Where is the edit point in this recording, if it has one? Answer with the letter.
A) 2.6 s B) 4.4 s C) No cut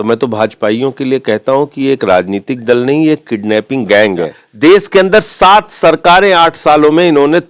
B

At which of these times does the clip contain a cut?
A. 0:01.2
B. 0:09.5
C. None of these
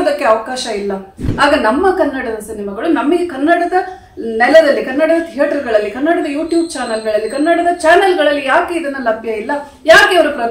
A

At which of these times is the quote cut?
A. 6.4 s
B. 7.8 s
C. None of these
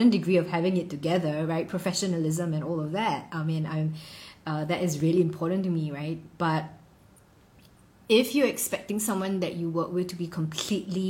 C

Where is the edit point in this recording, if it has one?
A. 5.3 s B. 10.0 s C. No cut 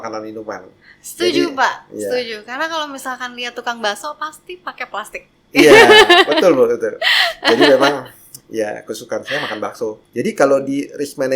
B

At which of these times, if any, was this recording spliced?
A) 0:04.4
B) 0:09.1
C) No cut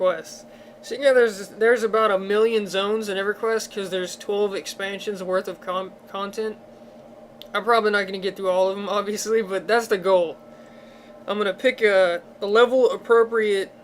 B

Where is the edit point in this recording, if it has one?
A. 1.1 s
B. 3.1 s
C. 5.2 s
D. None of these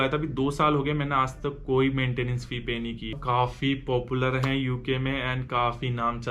B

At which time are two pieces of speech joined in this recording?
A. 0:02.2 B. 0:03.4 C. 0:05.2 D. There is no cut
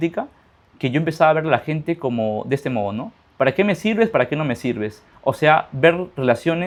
D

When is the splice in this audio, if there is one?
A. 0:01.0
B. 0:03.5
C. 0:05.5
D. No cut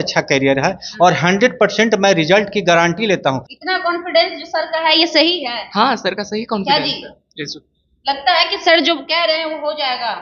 B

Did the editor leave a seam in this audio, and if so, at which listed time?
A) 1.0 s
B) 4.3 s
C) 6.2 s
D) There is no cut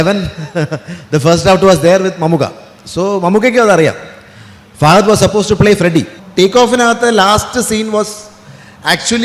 C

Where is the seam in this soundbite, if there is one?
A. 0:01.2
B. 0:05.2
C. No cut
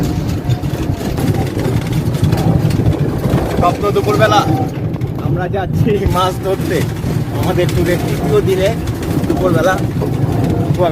A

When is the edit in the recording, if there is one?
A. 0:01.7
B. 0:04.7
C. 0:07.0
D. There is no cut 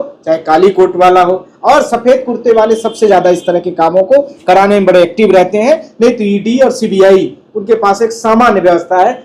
D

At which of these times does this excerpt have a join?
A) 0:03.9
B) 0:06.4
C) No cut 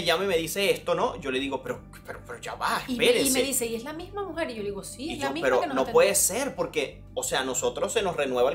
C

